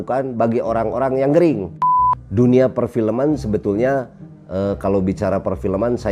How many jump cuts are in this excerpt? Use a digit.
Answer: 1